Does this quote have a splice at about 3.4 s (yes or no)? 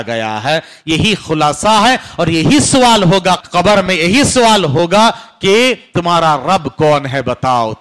yes